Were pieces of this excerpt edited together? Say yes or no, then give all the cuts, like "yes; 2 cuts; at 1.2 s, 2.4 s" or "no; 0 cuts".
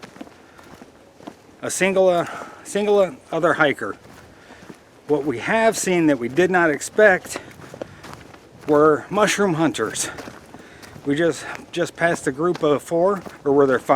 no; 0 cuts